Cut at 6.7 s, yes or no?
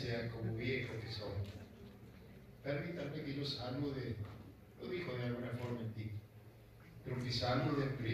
no